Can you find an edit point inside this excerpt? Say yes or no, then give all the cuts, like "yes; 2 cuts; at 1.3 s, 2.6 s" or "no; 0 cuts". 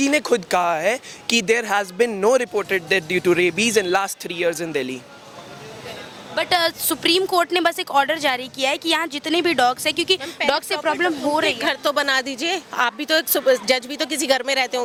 no; 0 cuts